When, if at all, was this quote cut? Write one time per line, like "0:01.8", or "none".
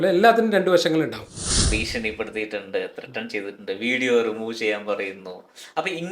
0:01.8